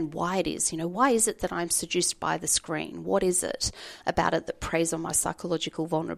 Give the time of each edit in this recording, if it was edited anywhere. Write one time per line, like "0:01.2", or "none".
0:00.9